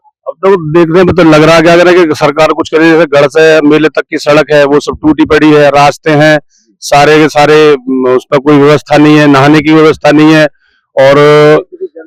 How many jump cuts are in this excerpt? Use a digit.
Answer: 0